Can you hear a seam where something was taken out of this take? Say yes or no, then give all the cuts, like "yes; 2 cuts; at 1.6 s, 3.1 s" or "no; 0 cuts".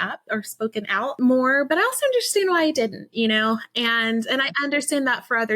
yes; 1 cut; at 1.2 s